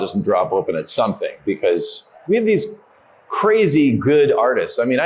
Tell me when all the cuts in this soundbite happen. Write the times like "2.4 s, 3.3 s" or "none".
2.2 s